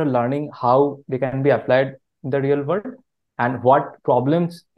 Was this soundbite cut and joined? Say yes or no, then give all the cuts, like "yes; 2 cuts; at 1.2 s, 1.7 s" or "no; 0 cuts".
no; 0 cuts